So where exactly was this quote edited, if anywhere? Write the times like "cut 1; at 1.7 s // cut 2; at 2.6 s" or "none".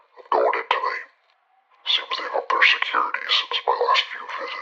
none